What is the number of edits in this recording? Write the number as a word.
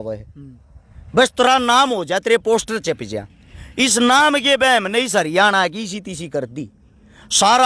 zero